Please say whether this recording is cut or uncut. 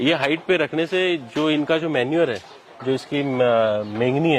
uncut